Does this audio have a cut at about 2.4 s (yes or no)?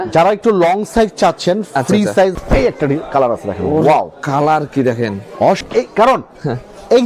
yes